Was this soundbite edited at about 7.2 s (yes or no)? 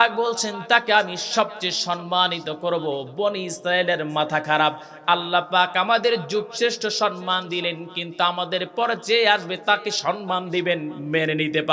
no